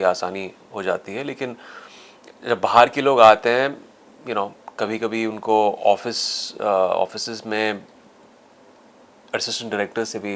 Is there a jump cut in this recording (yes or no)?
no